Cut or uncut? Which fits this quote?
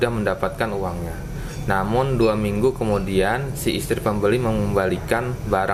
uncut